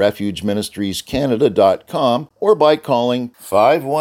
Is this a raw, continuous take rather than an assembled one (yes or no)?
no